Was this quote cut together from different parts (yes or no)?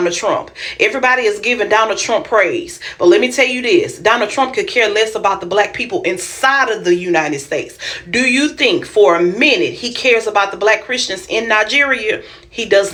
no